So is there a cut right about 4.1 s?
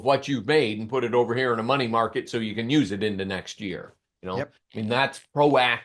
no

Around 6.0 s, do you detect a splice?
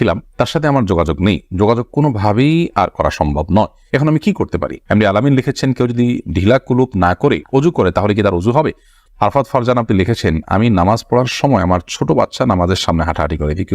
no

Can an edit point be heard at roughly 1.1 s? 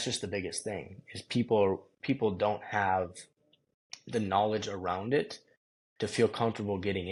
no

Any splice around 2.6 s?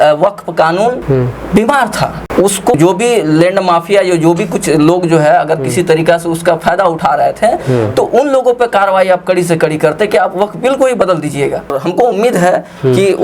yes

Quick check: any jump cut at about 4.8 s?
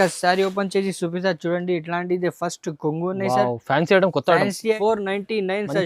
yes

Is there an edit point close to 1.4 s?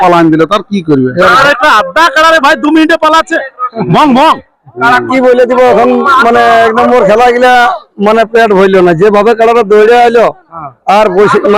yes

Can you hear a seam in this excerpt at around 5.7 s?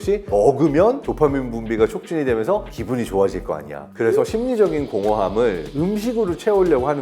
yes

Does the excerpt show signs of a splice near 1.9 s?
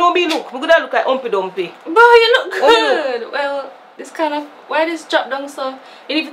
no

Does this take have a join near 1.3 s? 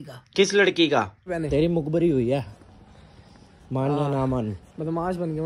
yes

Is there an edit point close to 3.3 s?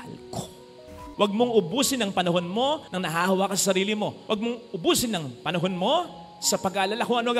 no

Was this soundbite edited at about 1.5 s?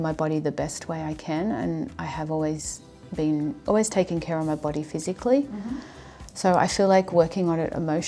no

